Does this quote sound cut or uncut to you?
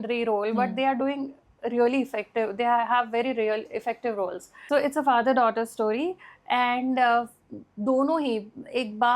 cut